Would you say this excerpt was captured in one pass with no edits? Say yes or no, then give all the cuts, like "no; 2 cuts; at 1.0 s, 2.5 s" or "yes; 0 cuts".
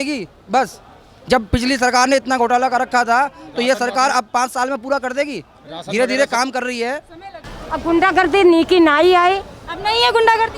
no; 1 cut; at 7.5 s